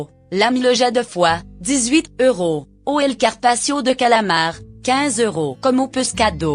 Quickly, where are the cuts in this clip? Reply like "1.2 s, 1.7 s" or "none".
none

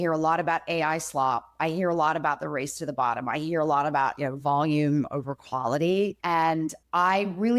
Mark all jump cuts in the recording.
6.2 s

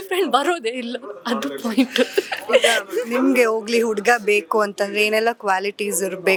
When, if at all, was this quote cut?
none

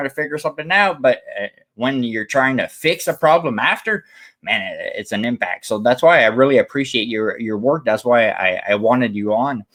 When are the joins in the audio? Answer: none

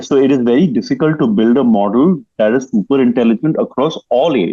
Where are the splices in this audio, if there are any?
none

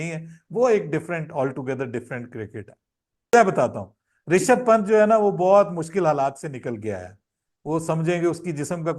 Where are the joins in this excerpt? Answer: 3.3 s

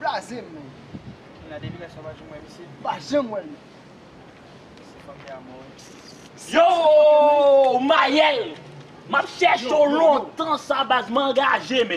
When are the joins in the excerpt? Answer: 7.1 s

